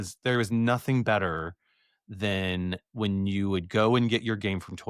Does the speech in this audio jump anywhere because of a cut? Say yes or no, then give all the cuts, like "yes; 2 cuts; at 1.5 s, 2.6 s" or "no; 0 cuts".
no; 0 cuts